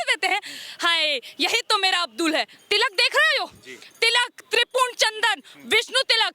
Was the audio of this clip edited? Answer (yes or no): yes